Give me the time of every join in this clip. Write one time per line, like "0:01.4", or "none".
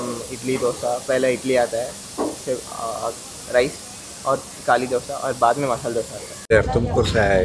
0:06.5